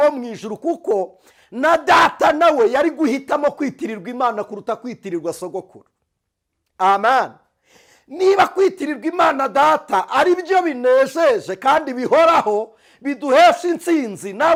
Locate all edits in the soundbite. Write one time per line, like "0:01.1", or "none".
none